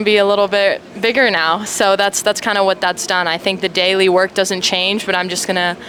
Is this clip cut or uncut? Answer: uncut